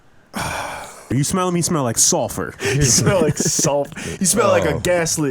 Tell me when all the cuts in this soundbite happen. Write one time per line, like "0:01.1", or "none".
0:01.0